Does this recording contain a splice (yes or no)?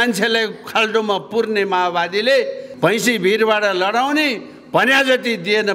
yes